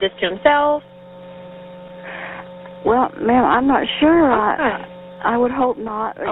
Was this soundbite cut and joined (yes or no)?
no